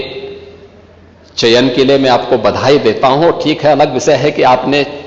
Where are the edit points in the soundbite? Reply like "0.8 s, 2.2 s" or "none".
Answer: none

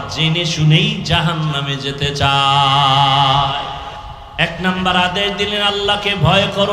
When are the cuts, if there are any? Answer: 3.8 s

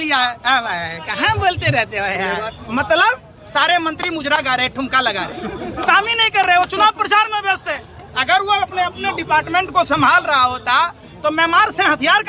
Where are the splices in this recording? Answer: 2.5 s

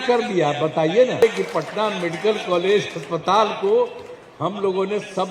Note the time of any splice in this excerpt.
1.2 s

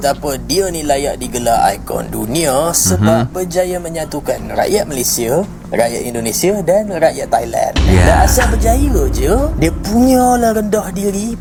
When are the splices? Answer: none

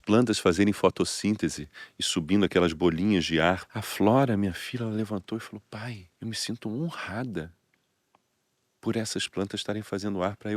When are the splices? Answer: 3.7 s, 6.1 s

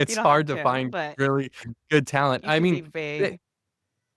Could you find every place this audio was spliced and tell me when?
none

